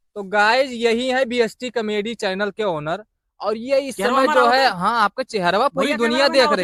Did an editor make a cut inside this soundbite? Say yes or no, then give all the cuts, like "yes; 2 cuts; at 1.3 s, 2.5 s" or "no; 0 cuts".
no; 0 cuts